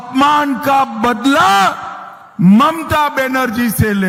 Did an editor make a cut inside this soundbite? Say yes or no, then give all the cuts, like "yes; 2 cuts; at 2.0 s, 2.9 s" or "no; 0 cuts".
no; 0 cuts